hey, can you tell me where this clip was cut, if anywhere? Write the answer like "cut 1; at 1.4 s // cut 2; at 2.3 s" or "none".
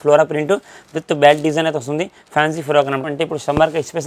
cut 1; at 3.0 s